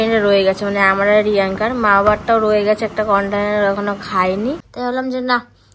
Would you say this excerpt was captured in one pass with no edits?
no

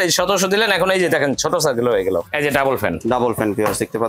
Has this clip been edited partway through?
yes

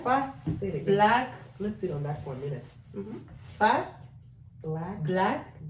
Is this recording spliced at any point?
no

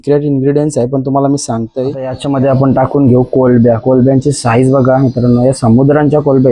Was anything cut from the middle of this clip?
yes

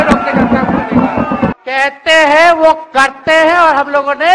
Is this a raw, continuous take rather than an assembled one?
no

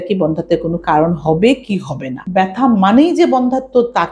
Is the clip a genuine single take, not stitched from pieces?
no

